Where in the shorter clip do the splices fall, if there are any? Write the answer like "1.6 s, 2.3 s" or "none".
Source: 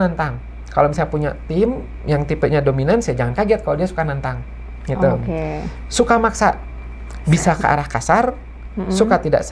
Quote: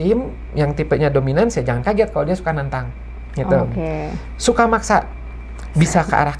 none

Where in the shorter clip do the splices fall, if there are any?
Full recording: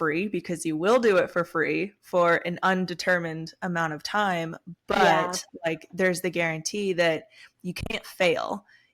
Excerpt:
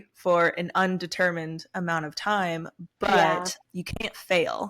3.6 s

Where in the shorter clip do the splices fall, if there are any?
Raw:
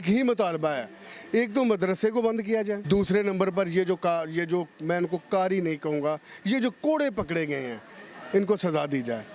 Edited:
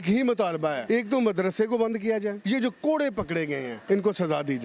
0.8 s, 2.3 s, 3.7 s

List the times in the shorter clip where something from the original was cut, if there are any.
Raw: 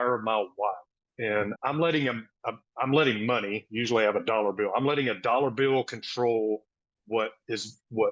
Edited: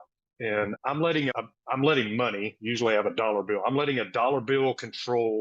1.5 s

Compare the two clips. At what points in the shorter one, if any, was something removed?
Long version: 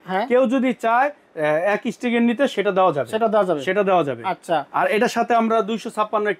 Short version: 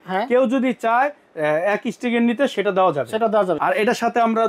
3.6 s

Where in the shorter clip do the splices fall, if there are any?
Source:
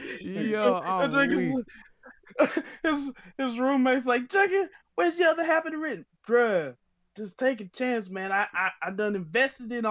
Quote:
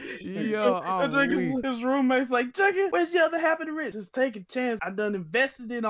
1.6 s, 2.9 s, 4.0 s, 4.8 s

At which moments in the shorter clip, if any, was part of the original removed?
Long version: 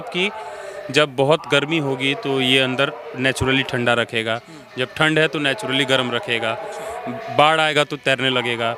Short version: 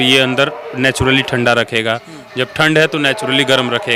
none

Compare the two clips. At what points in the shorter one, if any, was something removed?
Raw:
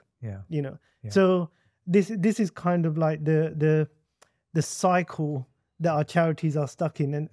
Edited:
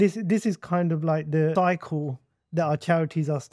1.5 s

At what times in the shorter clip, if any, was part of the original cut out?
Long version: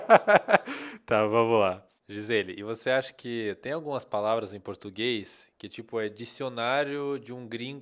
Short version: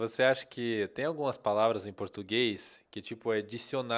none

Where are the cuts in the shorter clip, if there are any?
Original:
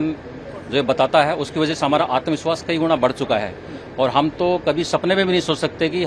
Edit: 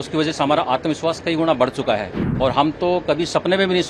2.2 s

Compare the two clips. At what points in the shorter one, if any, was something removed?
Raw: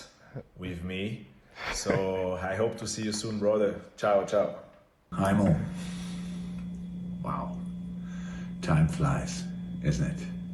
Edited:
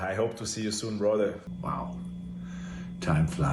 1.4 s

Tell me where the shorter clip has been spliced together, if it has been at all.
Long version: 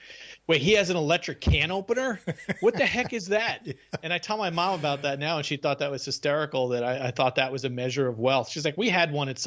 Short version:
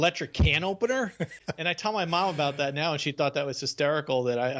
1.3 s

